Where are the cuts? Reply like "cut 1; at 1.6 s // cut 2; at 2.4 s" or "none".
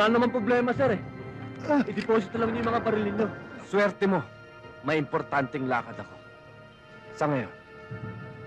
cut 1; at 3.5 s